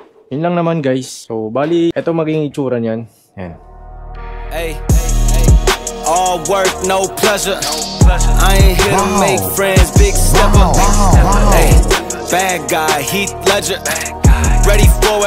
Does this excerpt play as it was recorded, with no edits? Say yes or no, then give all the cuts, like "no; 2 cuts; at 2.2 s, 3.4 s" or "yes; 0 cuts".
yes; 0 cuts